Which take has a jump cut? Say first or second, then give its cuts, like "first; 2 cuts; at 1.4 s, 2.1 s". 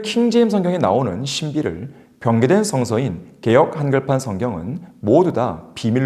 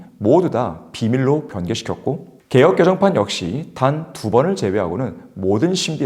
second; 1 cut; at 2.3 s